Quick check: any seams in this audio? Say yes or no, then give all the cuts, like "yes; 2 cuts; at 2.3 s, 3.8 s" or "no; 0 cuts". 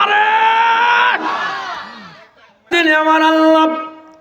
yes; 1 cut; at 2.7 s